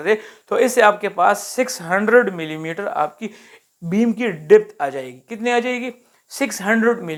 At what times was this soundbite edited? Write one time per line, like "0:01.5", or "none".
none